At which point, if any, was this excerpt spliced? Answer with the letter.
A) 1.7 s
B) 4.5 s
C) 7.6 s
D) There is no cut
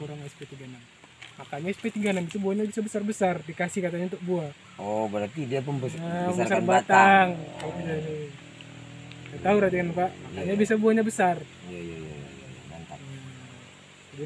D